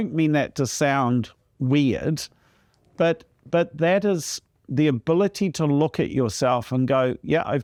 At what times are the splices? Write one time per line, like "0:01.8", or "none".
none